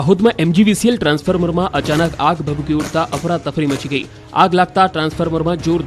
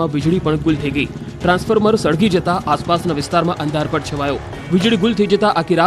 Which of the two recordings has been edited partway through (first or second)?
second